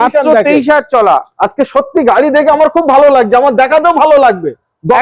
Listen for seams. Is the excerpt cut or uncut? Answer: uncut